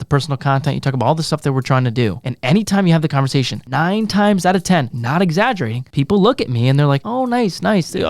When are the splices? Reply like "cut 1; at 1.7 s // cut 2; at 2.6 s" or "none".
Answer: cut 1; at 2.3 s // cut 2; at 3.6 s // cut 3; at 5.0 s // cut 4; at 5.8 s // cut 5; at 7.0 s